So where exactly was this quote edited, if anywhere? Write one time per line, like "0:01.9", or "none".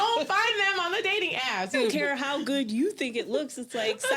0:01.7